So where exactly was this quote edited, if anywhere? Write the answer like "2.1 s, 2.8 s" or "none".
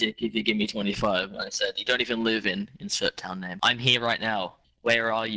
3.5 s, 4.6 s